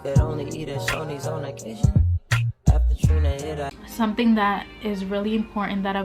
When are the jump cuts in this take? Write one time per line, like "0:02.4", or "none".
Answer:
0:03.7